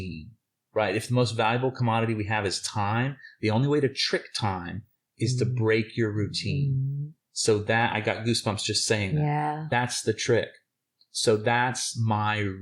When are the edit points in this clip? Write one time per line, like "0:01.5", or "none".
0:09.6

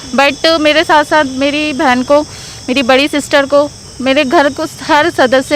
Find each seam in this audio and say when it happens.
none

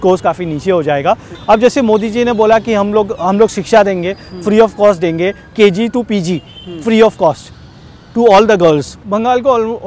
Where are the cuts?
0:01.3
0:09.0

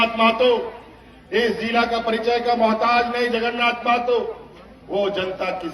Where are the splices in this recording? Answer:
none

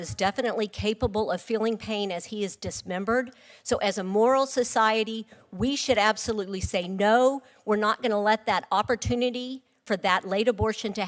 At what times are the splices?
none

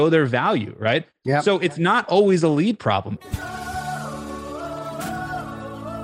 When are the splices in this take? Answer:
0:03.2

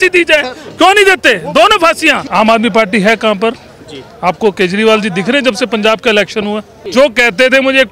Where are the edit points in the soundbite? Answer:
0:02.3
0:06.7

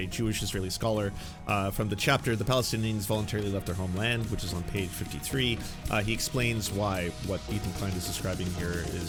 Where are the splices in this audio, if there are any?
none

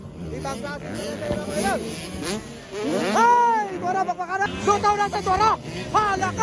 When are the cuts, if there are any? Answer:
0:04.5

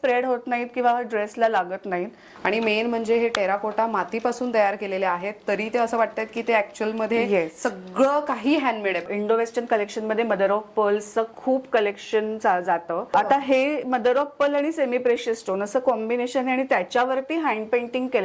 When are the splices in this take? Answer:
0:02.2
0:09.0
0:13.1

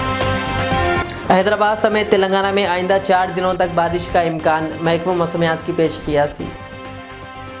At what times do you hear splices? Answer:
0:01.1

